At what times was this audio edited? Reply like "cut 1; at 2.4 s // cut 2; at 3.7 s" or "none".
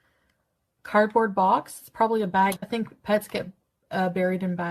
none